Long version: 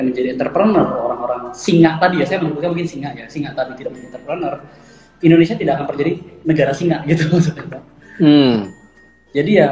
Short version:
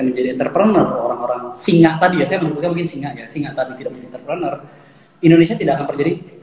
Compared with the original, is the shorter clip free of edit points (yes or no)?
yes